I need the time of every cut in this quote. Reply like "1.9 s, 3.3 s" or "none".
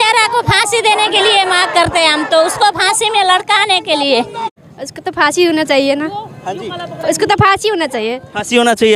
4.4 s